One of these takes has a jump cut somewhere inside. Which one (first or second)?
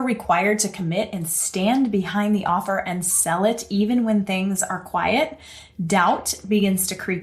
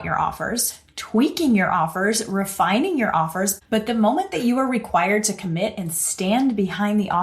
second